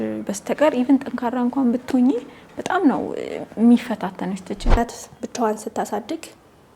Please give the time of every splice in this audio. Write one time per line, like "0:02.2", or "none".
0:04.8